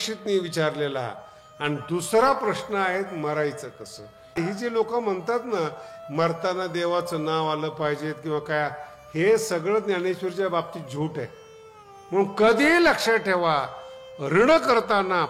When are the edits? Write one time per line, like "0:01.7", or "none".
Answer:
0:04.4
0:12.0